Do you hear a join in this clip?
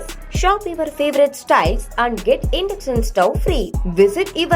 no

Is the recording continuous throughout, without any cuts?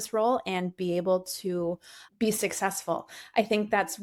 yes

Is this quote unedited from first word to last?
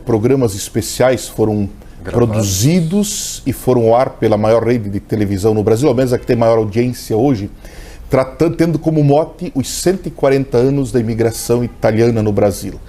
yes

